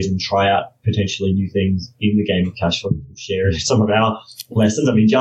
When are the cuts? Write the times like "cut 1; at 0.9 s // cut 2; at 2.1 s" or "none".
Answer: none